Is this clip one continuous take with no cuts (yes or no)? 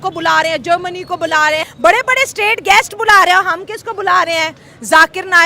no